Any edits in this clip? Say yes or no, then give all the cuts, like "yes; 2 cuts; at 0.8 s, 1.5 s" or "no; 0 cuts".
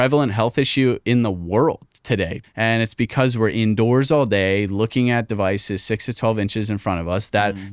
yes; 1 cut; at 2.4 s